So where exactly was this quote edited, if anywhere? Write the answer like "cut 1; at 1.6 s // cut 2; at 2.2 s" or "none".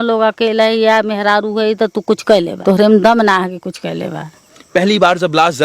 cut 1; at 2.5 s // cut 2; at 4.6 s